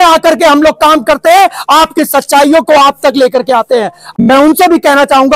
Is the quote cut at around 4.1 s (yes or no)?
yes